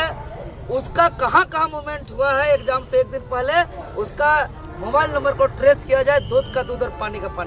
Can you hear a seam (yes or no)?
no